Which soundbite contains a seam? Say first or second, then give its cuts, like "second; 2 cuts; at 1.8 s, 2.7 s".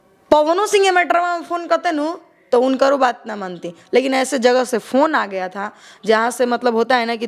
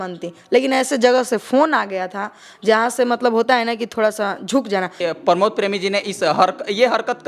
second; 1 cut; at 5.0 s